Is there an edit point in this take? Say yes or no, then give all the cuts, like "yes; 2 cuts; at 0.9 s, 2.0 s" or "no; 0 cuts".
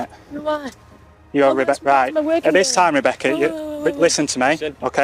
no; 0 cuts